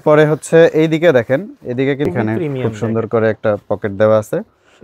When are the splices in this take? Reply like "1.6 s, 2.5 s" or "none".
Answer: 2.1 s